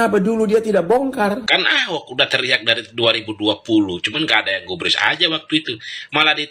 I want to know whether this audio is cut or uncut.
cut